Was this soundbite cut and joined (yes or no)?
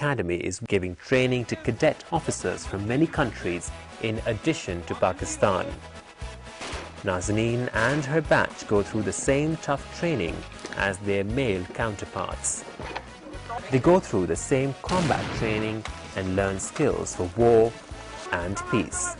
yes